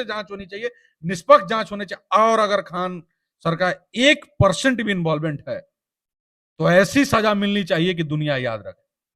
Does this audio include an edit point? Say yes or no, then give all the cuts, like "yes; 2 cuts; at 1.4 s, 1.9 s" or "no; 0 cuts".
no; 0 cuts